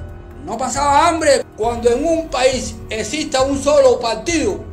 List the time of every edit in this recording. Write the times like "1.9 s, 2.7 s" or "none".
1.5 s

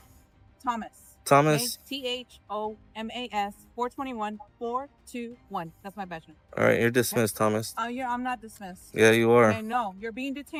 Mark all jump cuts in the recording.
none

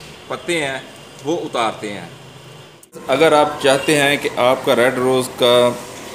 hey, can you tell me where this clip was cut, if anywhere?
3.2 s

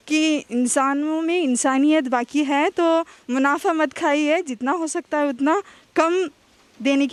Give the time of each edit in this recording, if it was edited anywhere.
none

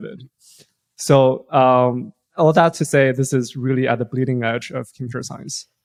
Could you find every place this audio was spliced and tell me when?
none

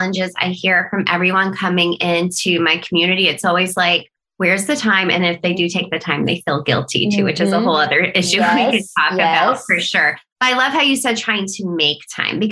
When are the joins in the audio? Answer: none

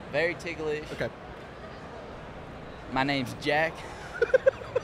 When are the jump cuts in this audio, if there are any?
none

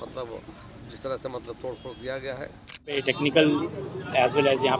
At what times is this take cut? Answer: 3.0 s

